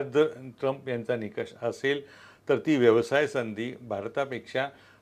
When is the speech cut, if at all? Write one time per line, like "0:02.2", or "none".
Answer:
none